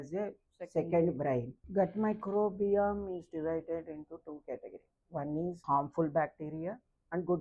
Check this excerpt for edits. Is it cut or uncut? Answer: cut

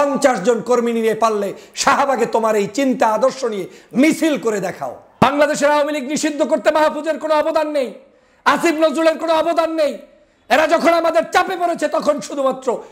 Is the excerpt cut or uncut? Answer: cut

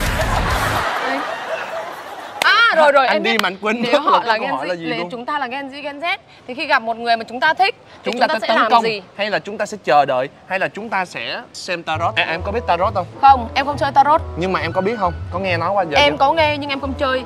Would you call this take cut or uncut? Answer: uncut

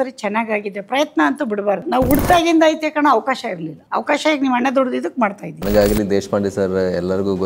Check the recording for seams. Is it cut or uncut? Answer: cut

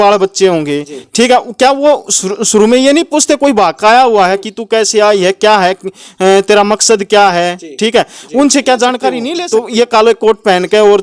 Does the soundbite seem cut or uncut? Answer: cut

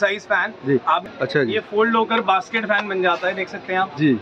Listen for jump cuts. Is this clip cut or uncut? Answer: cut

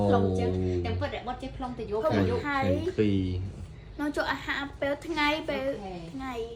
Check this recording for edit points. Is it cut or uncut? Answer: uncut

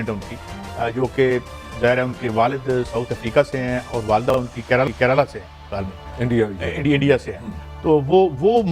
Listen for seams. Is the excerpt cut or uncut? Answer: uncut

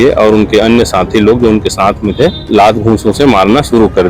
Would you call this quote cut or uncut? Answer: cut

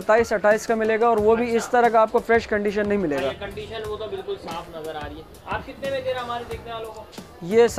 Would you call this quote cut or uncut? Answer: uncut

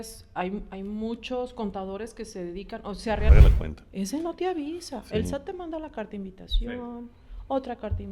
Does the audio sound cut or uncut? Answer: cut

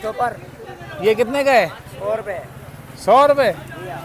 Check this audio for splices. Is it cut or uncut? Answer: uncut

